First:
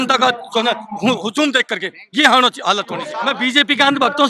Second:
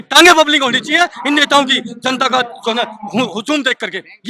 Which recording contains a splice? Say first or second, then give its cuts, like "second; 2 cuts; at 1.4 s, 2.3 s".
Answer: first; 1 cut; at 3.1 s